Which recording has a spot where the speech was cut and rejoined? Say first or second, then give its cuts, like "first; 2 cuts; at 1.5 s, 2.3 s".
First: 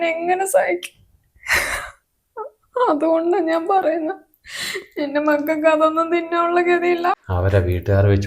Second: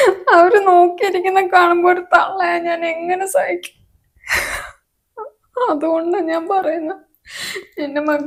first; 1 cut; at 7.2 s